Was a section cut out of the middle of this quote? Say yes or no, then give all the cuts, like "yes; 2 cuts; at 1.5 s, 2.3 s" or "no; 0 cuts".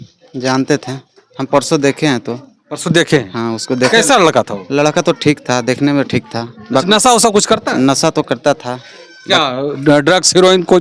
no; 0 cuts